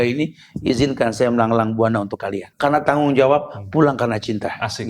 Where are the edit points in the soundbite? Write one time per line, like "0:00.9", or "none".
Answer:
0:02.4